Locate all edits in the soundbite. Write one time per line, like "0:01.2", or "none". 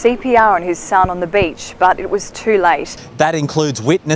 none